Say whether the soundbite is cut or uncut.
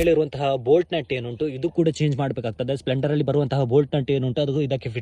uncut